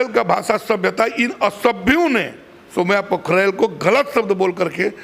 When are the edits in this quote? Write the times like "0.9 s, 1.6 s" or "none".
none